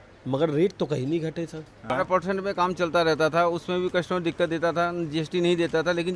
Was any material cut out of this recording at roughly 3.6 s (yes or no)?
no